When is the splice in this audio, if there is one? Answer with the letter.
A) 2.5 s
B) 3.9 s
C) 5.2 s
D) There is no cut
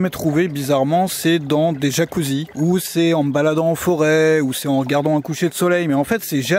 A